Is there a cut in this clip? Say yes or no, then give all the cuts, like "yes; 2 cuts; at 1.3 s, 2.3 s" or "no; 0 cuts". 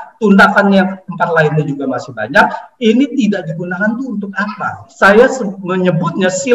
yes; 1 cut; at 4.8 s